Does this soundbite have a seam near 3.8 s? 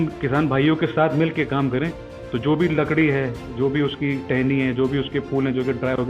no; 1 cut; at 2.1 s

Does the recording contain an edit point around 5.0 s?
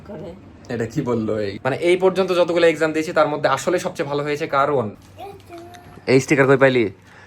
yes; 2 cuts; at 1.6 s, 5.0 s

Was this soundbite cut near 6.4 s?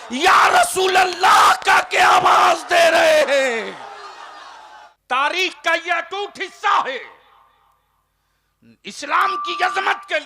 no; 1 cut; at 4.9 s

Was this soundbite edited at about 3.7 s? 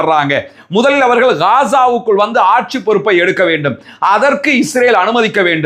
no; 0 cuts

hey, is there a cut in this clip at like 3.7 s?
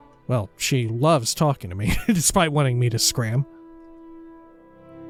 no; 0 cuts

